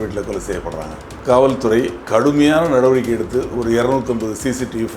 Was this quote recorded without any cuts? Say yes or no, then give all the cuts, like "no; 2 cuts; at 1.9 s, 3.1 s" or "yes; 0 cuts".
no; 2 cuts; at 1.1 s, 2.0 s